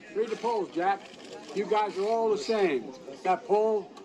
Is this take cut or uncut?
cut